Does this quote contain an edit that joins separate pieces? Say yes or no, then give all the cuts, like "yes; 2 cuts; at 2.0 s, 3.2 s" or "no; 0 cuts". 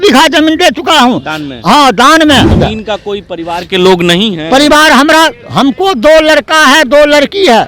yes; 1 cut; at 2.5 s